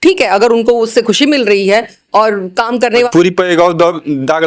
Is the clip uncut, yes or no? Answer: no